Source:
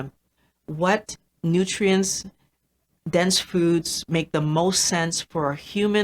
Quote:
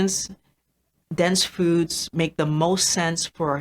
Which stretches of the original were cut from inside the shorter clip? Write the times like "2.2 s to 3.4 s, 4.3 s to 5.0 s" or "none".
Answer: none